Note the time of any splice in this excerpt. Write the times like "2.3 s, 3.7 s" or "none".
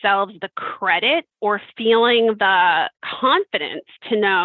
3.0 s